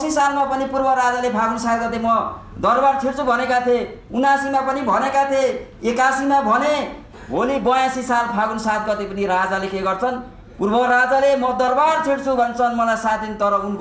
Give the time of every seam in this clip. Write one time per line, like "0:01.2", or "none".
none

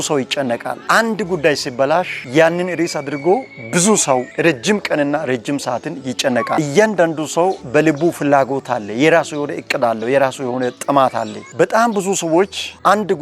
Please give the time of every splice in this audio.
0:04.3
0:06.5
0:07.6

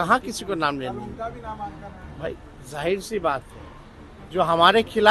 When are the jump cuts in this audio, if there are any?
none

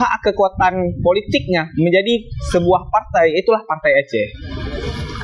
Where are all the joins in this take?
none

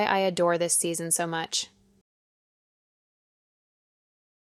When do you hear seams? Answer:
none

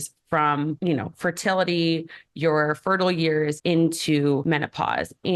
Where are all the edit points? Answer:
0:00.8
0:03.6
0:04.4

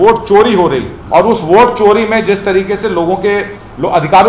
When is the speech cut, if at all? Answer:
0:00.9

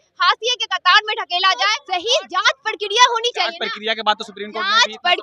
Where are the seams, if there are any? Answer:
0:01.8

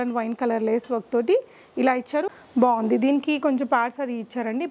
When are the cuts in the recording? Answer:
0:02.4

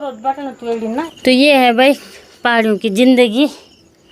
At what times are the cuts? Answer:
0:01.0

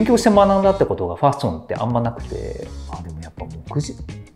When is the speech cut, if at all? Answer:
0:02.7

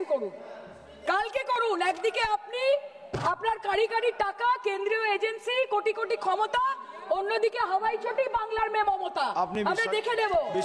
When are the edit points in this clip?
none

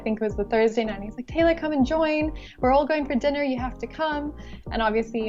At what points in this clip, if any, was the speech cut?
none

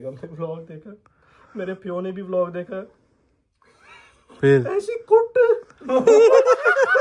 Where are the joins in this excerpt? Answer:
none

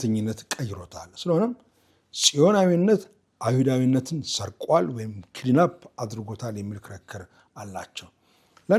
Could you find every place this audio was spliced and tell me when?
none

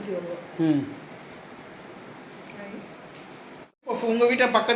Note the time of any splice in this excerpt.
0:03.7

